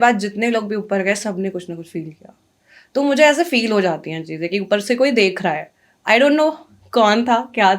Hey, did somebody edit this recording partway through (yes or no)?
no